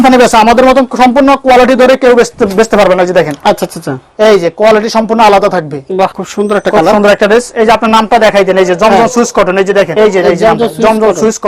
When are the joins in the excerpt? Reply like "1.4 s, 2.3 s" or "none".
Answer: 6.2 s, 9.9 s